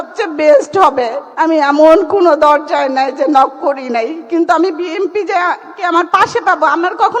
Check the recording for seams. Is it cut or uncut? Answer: cut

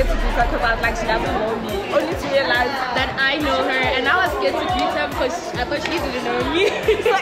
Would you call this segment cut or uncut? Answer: uncut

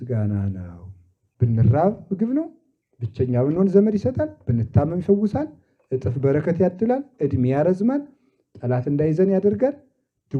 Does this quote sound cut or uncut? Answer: cut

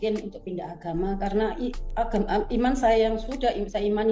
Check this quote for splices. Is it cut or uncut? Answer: uncut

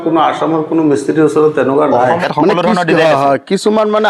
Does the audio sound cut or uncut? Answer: cut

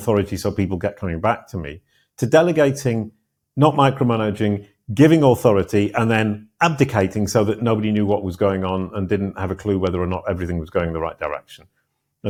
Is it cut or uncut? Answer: uncut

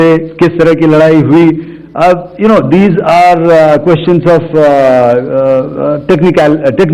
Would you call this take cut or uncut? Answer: uncut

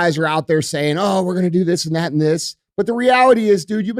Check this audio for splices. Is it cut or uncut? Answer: uncut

